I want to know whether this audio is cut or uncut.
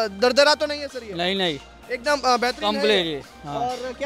uncut